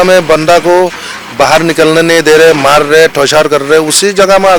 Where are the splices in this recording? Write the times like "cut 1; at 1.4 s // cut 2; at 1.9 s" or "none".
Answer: none